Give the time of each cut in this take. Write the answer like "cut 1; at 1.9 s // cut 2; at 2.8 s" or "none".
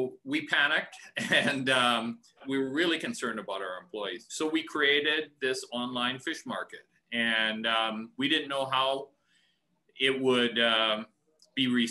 cut 1; at 2.4 s // cut 2; at 4.2 s